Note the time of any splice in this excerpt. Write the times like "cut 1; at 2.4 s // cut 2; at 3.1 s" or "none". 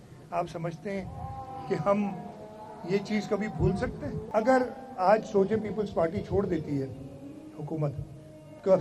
cut 1; at 4.2 s